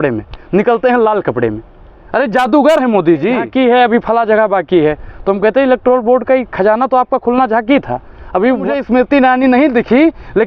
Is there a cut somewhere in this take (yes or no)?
yes